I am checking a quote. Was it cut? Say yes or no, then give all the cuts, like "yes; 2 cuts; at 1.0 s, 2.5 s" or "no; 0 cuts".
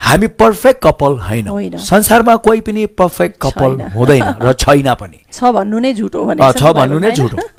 no; 0 cuts